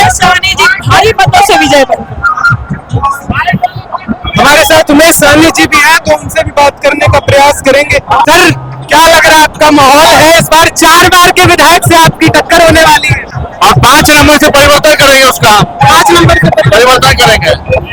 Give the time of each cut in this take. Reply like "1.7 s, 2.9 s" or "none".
none